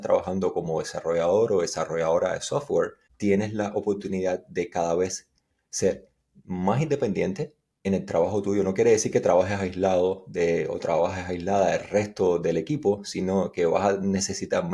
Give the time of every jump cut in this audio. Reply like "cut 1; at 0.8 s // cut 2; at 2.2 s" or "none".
cut 1; at 3.0 s